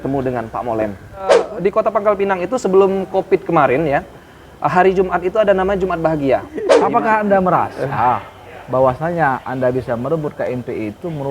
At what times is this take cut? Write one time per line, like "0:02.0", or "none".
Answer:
0:01.5
0:06.7